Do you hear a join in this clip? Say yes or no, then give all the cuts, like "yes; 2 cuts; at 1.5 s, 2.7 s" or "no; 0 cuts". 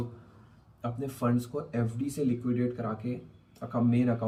no; 0 cuts